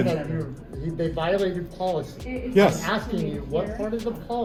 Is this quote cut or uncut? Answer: uncut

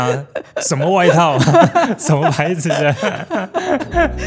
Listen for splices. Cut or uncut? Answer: uncut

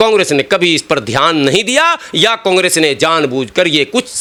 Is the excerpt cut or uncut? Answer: uncut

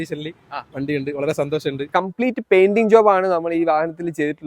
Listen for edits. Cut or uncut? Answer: cut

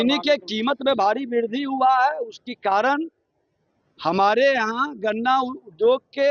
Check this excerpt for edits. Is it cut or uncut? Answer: uncut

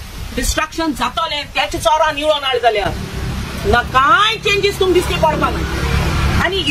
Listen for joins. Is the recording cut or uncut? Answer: uncut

